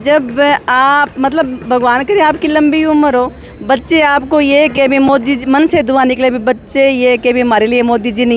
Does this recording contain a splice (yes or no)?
no